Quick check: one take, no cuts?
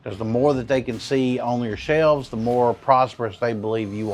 yes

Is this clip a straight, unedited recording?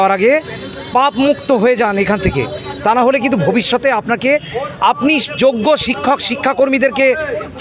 yes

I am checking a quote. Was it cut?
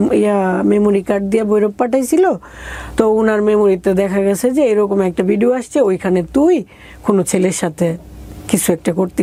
no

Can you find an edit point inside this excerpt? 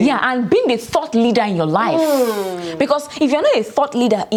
no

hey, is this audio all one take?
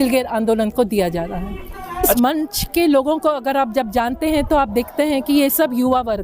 no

